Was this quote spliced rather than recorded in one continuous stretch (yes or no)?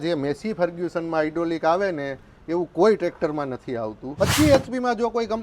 yes